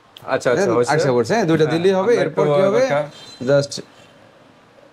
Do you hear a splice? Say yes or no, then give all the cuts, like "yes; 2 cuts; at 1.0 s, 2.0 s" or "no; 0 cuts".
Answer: no; 0 cuts